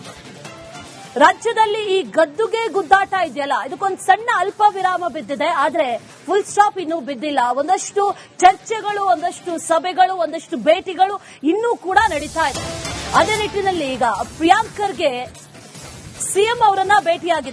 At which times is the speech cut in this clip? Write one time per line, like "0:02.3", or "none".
0:00.9